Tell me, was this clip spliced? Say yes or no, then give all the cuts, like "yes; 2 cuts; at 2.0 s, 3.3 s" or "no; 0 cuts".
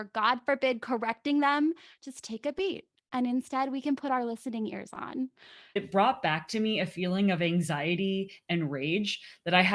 yes; 1 cut; at 5.8 s